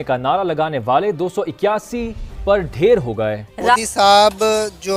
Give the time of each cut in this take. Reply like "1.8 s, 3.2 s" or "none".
3.8 s